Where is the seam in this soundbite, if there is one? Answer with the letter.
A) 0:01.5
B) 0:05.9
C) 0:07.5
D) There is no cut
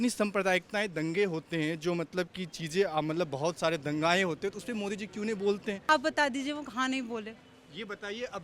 B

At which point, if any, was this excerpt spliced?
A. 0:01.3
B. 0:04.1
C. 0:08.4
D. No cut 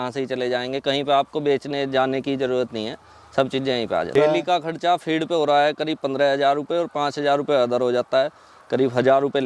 B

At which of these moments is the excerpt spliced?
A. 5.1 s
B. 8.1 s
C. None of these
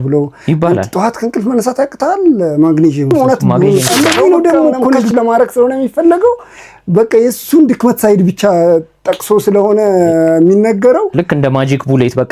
A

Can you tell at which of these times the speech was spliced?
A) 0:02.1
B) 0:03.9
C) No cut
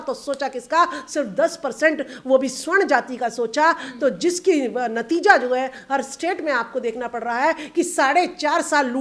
C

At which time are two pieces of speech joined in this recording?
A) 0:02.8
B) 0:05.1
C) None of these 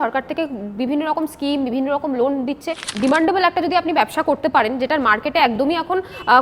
A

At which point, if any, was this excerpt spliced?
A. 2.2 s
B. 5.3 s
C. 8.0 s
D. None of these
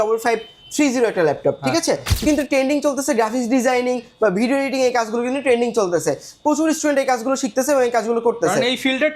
A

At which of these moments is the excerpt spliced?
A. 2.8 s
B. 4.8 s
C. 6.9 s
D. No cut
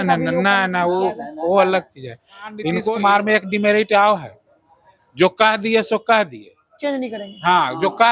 A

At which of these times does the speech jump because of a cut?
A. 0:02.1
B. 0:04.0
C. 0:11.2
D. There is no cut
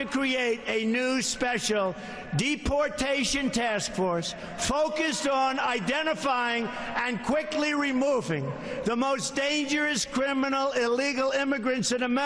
D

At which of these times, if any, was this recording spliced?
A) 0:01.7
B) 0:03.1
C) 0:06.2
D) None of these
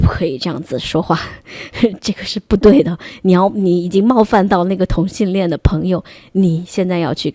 D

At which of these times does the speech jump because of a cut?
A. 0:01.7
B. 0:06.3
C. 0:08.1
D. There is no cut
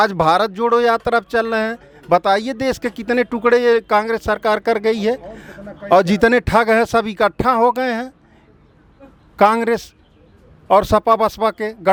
D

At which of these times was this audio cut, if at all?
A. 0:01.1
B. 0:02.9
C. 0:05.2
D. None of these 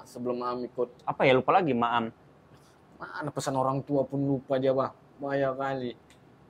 A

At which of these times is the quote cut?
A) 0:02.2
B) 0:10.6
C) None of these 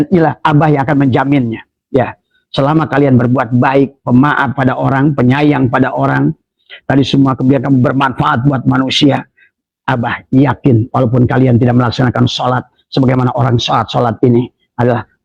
C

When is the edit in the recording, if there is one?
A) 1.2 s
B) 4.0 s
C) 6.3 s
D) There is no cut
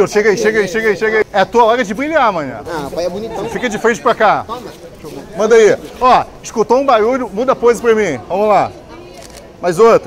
A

